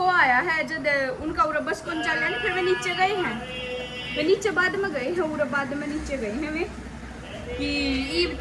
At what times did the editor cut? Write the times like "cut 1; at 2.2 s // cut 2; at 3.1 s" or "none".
none